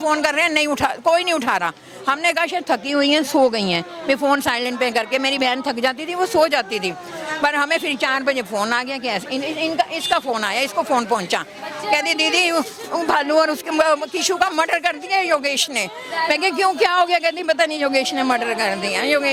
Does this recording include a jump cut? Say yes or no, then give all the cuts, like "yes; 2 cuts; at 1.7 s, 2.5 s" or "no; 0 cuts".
no; 0 cuts